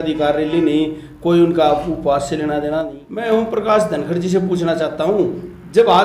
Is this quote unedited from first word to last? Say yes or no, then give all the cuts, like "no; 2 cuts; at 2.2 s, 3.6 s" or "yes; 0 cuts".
no; 1 cut; at 3.0 s